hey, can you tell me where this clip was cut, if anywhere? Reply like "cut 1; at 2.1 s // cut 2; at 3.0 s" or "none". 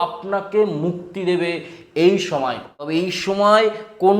cut 1; at 2.9 s